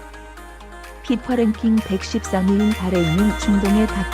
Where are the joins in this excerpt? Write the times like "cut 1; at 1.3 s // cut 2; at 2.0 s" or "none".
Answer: cut 1; at 1.0 s